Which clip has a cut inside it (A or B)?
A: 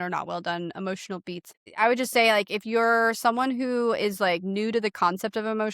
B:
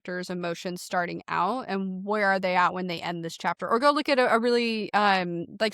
A